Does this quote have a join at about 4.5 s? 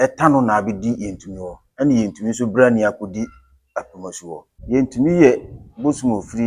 yes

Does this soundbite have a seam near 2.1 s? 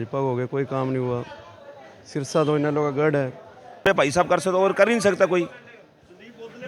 no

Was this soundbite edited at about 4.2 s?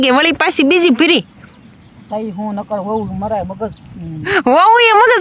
yes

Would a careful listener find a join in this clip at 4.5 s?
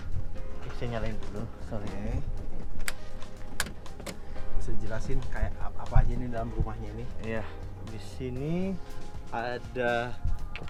no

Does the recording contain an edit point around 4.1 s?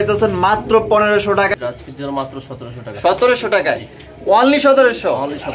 no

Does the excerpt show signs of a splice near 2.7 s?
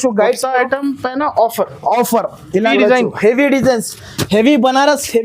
yes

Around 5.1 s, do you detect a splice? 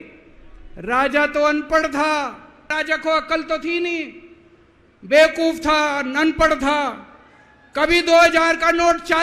no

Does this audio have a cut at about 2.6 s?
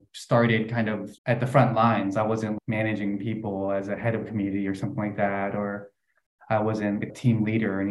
yes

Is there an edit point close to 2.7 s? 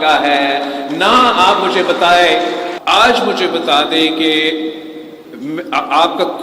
yes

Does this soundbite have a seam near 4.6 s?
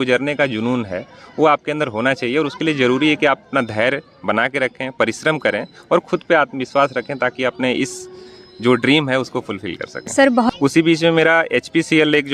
no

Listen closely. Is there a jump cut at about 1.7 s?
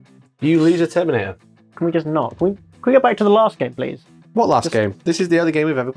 yes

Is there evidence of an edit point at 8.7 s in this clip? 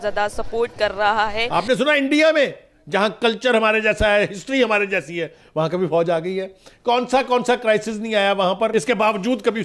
yes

